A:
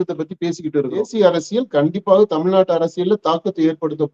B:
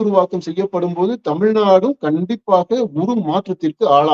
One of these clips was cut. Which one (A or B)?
A